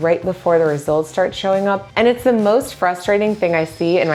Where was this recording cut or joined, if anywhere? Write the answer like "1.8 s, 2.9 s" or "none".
none